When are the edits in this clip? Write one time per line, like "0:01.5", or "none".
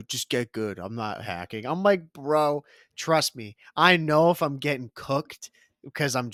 none

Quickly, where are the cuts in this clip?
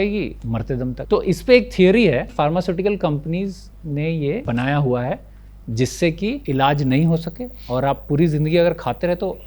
0:01.0
0:02.3
0:04.4
0:06.4

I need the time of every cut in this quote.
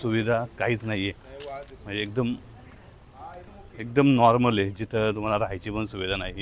none

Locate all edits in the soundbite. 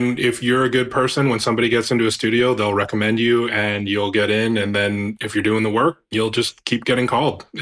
0:05.2
0:06.0

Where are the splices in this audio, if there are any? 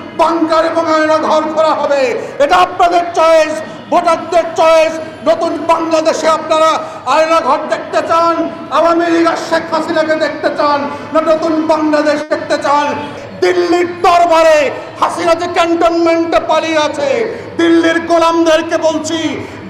0:13.2

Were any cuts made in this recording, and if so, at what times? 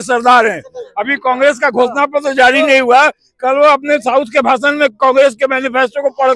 none

